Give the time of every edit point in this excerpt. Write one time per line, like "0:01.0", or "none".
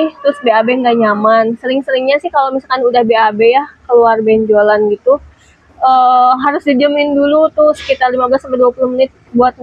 none

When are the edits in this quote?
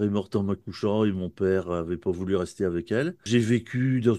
0:03.3

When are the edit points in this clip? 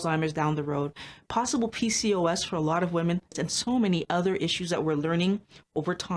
0:03.3

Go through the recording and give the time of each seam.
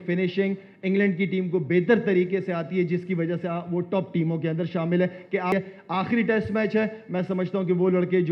0:05.5

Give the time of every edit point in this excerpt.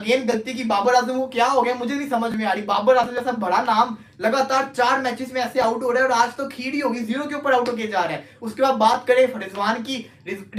none

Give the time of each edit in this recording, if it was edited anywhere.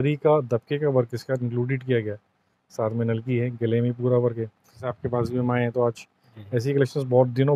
0:04.8

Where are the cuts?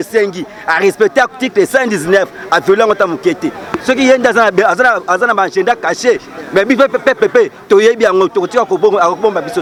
none

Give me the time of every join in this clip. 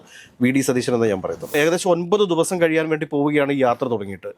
0:01.4

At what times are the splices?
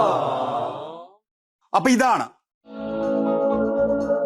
0:02.9

